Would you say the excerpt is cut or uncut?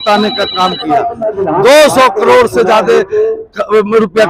cut